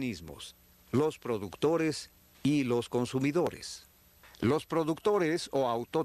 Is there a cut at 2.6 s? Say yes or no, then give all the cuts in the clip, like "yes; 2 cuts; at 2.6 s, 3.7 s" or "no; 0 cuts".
yes; 1 cut; at 2.6 s